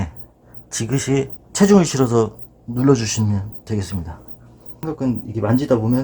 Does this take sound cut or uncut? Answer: cut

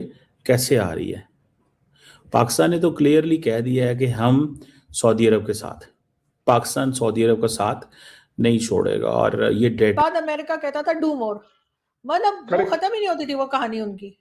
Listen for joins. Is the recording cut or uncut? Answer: cut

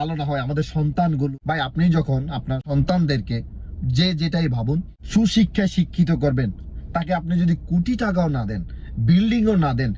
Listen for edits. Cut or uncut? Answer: cut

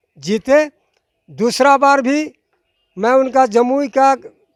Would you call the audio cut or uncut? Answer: uncut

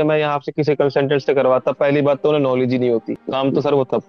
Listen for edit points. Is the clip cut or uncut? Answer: cut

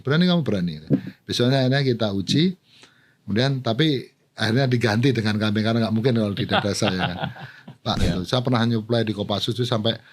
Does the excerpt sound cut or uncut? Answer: cut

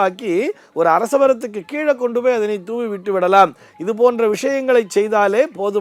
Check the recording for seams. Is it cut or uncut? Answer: uncut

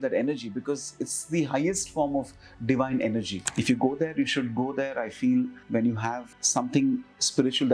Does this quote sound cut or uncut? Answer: cut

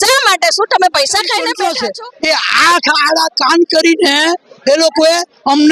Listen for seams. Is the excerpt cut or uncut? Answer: cut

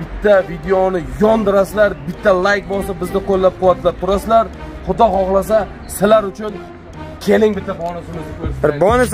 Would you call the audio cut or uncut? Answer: uncut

